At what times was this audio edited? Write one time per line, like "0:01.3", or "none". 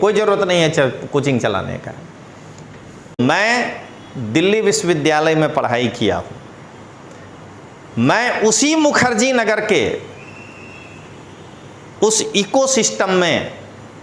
0:03.2